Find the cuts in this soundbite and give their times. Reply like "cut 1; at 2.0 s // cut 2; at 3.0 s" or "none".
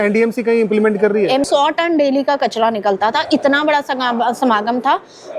cut 1; at 1.5 s